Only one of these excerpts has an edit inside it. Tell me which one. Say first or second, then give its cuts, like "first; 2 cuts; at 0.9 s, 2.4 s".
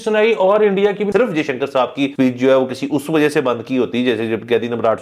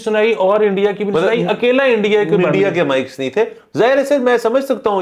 first; 2 cuts; at 1.1 s, 2.1 s